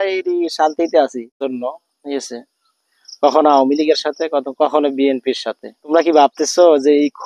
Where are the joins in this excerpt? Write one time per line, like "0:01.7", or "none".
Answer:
0:01.5
0:05.9